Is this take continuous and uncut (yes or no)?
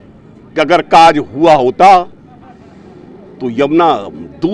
yes